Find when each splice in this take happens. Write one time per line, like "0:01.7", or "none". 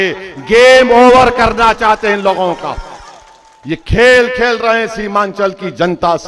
none